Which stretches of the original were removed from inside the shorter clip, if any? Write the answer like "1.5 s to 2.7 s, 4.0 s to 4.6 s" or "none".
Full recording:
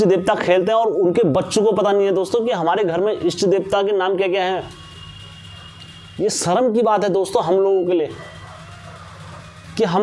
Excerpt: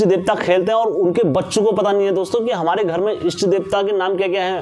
none